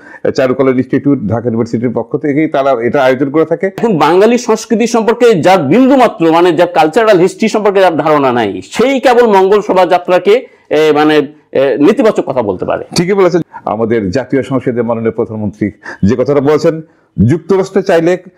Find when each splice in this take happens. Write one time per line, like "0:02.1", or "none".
0:03.8
0:13.4